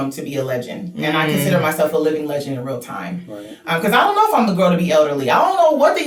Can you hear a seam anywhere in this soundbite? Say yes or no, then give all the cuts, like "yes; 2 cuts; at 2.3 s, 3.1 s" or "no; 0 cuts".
no; 0 cuts